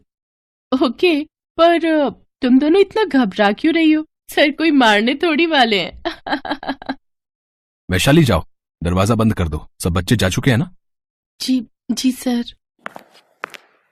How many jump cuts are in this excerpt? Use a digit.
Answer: 0